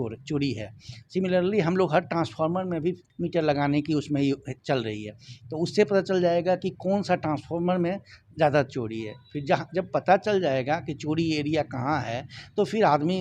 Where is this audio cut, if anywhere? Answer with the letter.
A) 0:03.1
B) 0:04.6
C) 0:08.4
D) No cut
A